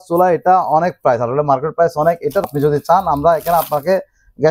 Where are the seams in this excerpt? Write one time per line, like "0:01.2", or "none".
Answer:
0:02.5